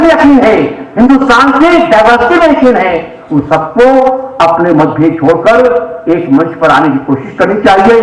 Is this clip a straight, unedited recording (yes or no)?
yes